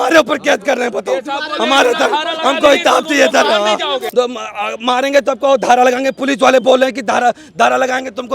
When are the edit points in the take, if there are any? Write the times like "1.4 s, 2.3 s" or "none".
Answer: 4.0 s